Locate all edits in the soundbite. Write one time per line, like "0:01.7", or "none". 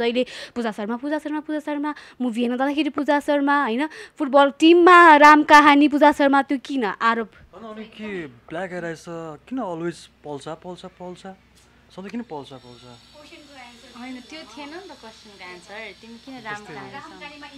none